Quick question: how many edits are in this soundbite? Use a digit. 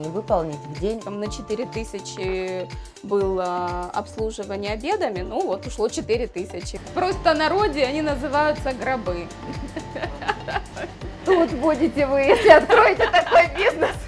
2